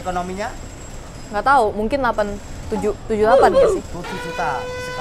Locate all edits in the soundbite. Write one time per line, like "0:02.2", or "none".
none